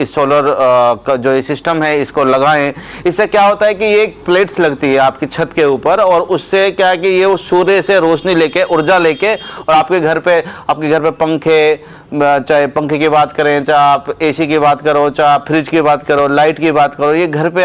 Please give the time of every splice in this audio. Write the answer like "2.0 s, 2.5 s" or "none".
none